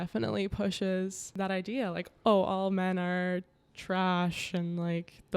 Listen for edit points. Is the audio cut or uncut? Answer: cut